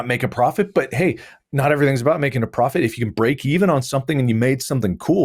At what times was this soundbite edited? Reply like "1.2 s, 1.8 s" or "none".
none